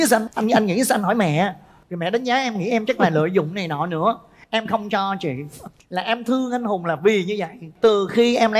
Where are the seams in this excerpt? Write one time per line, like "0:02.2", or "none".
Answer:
none